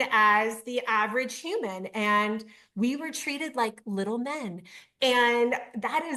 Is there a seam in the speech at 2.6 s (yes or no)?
no